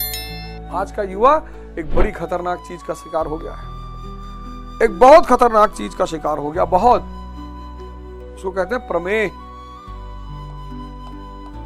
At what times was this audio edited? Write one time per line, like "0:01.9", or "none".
0:07.0
0:08.4
0:09.3